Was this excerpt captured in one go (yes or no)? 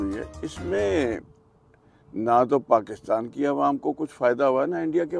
yes